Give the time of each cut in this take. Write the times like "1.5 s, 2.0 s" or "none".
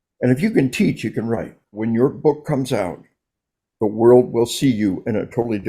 1.8 s